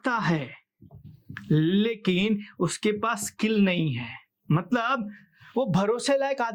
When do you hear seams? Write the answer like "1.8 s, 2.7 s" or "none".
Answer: none